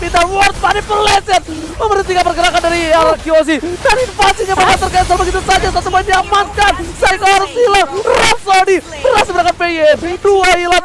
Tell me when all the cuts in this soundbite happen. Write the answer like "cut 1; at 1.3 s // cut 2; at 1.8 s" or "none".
none